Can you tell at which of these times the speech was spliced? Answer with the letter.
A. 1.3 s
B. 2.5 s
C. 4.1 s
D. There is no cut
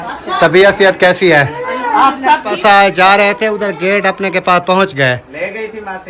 B